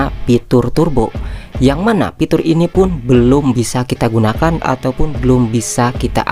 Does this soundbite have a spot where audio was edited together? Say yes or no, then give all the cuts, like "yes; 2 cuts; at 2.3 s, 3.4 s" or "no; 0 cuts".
no; 0 cuts